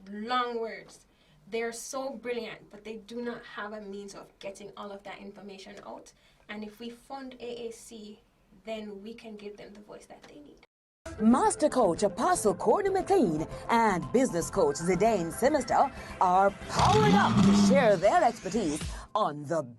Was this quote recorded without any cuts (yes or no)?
no